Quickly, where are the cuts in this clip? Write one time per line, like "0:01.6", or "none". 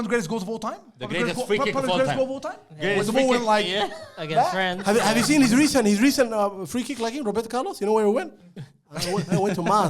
0:04.8